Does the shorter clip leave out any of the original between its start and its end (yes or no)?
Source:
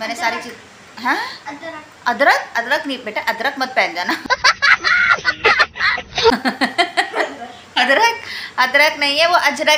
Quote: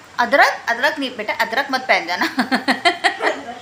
yes